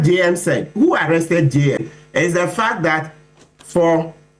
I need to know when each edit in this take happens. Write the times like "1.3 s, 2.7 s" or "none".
2.0 s